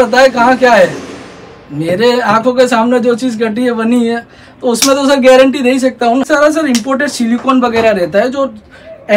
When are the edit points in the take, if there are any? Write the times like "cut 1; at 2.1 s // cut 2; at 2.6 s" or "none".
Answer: cut 1; at 6.3 s